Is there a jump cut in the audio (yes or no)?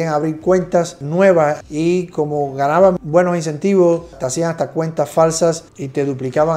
no